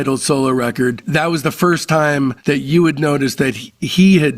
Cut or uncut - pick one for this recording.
cut